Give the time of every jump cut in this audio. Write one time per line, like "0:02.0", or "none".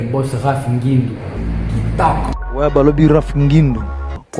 0:01.3
0:02.3